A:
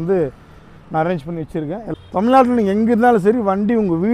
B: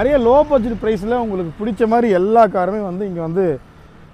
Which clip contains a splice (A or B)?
A